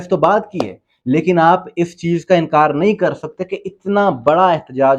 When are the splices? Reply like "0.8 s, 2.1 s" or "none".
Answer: none